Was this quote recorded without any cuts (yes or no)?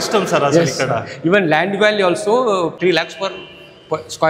yes